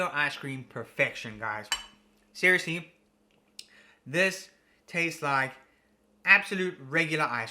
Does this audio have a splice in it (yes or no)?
no